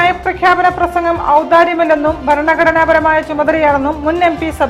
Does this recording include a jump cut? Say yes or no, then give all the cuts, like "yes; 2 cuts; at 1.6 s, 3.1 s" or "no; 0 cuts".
no; 0 cuts